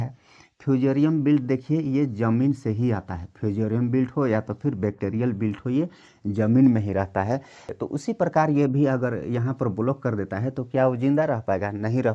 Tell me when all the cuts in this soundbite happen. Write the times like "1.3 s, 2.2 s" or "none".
7.7 s